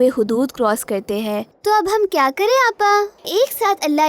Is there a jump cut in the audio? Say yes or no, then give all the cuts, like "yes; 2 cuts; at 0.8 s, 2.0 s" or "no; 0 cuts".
yes; 2 cuts; at 1.5 s, 3.3 s